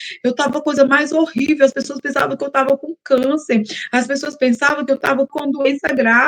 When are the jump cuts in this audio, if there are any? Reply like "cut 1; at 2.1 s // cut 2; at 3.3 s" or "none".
cut 1; at 5.3 s